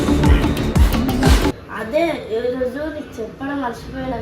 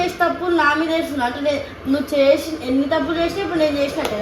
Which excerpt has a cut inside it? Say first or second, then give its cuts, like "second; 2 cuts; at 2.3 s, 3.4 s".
first; 1 cut; at 1.6 s